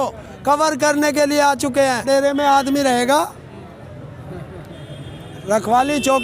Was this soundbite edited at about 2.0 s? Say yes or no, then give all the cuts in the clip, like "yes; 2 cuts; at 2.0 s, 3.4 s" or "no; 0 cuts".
yes; 1 cut; at 2.0 s